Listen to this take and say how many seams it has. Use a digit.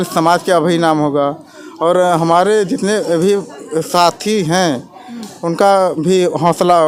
0